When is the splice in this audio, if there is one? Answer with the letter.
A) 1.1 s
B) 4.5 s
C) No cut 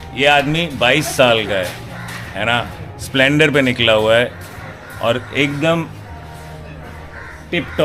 C